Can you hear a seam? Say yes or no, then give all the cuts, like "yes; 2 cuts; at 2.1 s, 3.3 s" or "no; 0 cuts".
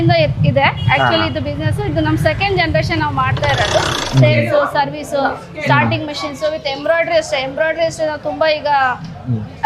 yes; 1 cut; at 3.9 s